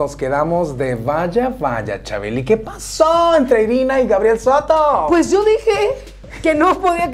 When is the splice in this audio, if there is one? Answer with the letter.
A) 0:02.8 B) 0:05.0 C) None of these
C